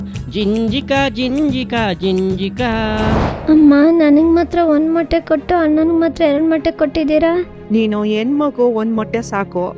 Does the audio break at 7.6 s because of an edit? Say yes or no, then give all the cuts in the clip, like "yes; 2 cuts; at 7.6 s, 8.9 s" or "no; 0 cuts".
yes; 2 cuts; at 3.3 s, 7.6 s